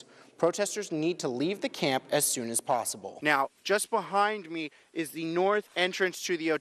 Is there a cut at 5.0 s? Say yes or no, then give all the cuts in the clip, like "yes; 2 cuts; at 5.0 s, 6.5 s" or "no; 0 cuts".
no; 1 cut; at 3.0 s